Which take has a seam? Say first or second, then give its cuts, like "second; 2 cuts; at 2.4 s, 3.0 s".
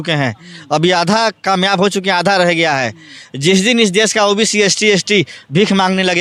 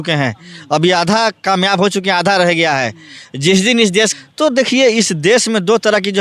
second; 1 cut; at 4.1 s